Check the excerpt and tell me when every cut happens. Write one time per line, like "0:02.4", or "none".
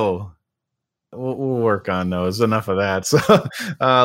0:00.9